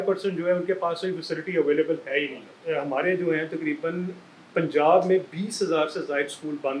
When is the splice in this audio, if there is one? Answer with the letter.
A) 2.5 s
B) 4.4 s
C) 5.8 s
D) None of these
A